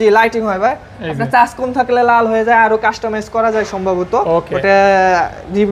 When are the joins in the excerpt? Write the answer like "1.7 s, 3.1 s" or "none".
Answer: none